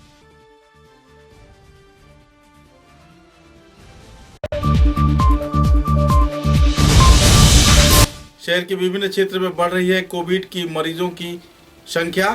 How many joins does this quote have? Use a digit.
2